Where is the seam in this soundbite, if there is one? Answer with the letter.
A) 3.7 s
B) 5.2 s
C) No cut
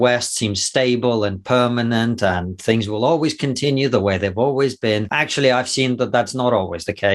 B